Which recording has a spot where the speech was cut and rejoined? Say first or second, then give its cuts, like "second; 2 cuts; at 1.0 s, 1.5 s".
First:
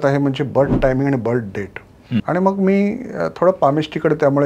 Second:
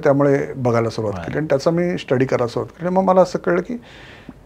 first; 1 cut; at 2.2 s